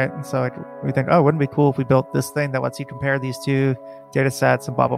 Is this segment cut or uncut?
uncut